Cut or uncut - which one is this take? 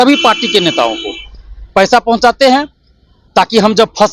uncut